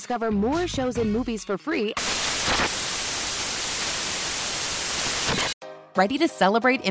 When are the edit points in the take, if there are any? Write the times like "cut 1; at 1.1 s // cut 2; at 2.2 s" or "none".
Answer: cut 1; at 5.5 s